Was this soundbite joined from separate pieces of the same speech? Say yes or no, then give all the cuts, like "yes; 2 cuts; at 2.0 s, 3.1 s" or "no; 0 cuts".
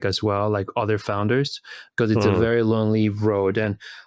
no; 0 cuts